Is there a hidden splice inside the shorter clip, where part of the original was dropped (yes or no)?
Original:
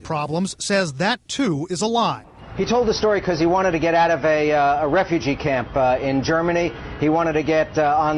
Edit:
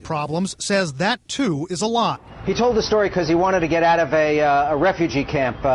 yes